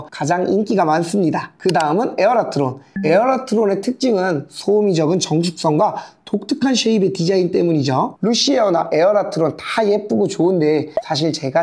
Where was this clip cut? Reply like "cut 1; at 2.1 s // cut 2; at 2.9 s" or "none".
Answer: cut 1; at 8.1 s